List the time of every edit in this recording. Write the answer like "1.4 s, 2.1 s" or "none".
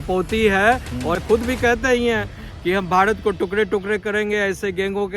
1.2 s